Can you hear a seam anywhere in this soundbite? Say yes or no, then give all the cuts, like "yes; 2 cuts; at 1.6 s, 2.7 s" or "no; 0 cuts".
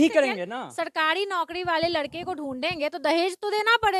no; 0 cuts